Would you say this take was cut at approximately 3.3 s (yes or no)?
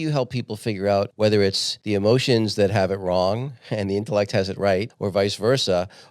no